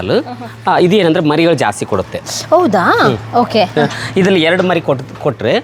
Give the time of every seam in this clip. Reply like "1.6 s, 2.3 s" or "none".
none